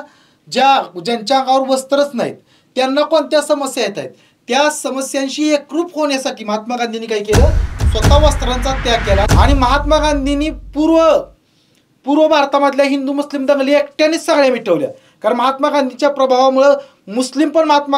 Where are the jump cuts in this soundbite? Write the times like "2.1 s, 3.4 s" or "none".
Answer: 9.3 s